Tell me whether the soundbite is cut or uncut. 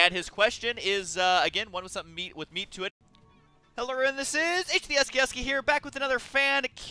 uncut